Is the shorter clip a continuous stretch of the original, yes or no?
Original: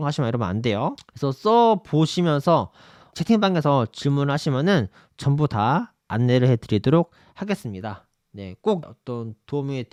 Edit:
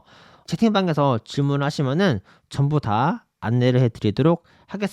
yes